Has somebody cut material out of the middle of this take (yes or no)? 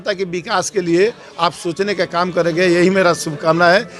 no